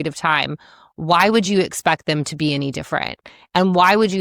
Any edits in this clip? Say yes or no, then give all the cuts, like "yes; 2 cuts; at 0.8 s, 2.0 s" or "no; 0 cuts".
no; 0 cuts